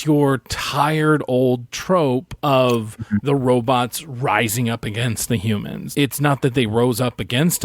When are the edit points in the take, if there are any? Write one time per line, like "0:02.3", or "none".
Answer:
0:05.8